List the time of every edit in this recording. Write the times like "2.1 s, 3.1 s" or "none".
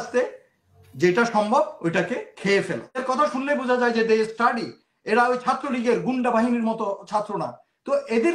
3.0 s